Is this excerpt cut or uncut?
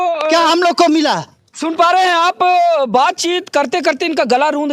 uncut